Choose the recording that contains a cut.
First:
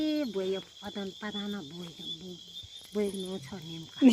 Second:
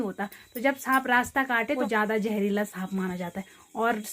second; 1 cut; at 1.8 s

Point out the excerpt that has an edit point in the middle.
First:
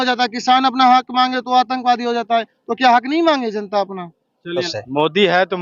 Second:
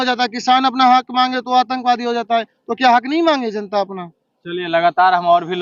first; 1 cut; at 4.6 s

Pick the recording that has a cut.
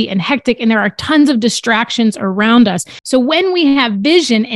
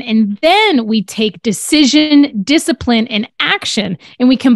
first; 1 cut; at 2.9 s

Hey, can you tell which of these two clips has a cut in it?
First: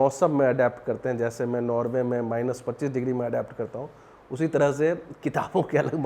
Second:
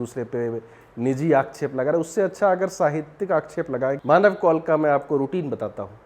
second; 1 cut; at 4.0 s

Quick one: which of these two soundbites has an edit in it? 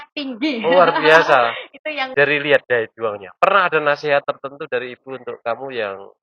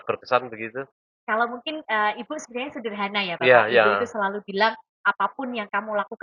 first; 1 cut; at 2.1 s

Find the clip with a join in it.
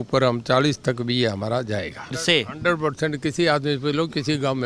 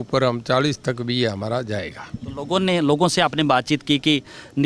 first; 1 cut; at 2.1 s

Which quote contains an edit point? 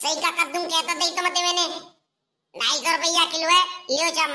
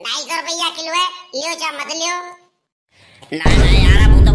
second; 1 cut; at 3.4 s

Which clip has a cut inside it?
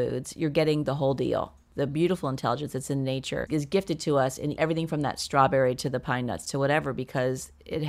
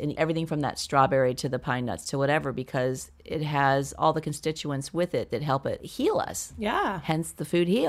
first; 1 cut; at 3.5 s

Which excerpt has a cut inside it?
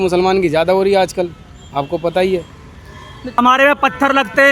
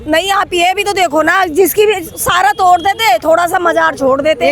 first; 1 cut; at 3.4 s

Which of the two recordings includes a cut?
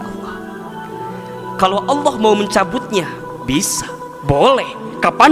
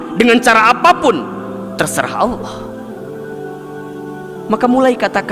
second; 2 cuts; at 2.8 s, 4.4 s

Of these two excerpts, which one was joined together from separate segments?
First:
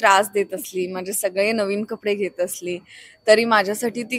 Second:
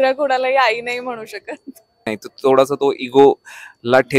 second; 1 cut; at 2.1 s

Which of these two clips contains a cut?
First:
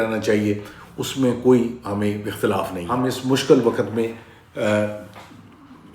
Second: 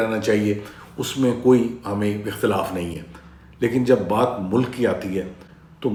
first; 1 cut; at 2.9 s

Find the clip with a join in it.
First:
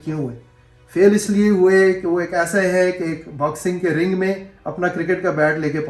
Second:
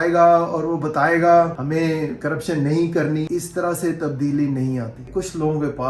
second; 3 cuts; at 1.6 s, 3.3 s, 5.0 s

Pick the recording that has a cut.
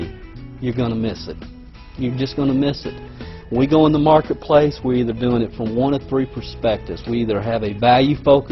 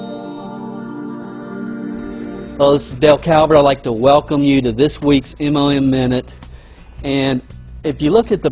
second; 1 cut; at 5.0 s

